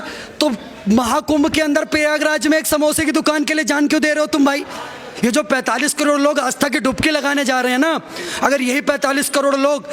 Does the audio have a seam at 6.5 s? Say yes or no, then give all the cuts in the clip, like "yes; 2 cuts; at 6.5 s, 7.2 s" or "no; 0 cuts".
no; 1 cut; at 5.0 s